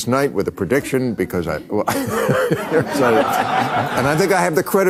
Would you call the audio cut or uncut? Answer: uncut